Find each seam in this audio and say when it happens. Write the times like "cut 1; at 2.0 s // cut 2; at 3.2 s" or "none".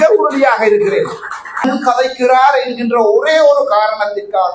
cut 1; at 1.6 s